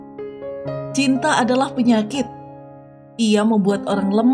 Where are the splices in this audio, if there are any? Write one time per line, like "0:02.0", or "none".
0:00.9